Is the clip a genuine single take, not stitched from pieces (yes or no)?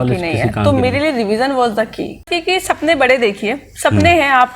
no